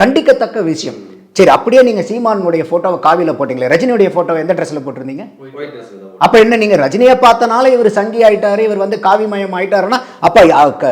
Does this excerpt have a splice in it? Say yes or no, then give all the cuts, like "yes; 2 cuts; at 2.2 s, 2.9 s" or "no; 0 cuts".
no; 0 cuts